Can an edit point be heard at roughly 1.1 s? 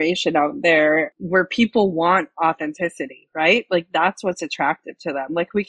yes; 1 cut; at 1.1 s

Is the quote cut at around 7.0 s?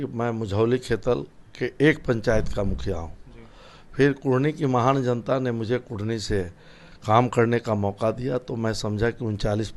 no; 0 cuts

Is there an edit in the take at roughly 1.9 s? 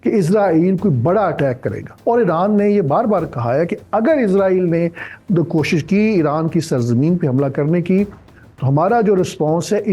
yes; 1 cut; at 1.9 s

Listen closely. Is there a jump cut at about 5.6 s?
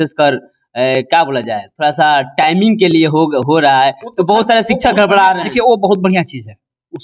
no; 0 cuts

